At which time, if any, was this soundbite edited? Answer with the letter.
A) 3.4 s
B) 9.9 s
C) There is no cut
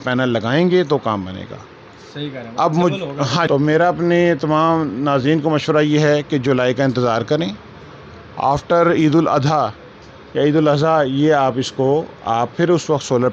A